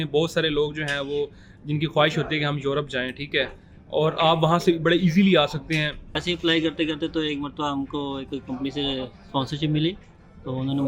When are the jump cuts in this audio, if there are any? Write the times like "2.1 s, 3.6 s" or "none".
6.2 s